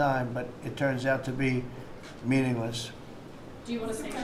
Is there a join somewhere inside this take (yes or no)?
no